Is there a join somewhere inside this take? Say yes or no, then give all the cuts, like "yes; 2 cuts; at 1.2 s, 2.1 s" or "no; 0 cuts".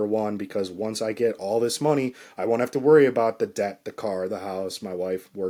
no; 0 cuts